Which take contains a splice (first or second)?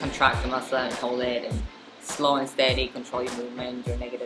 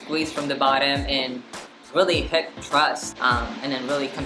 second